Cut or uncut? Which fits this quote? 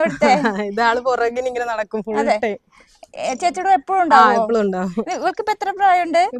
uncut